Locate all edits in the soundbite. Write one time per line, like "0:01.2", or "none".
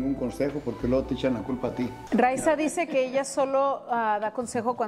0:02.0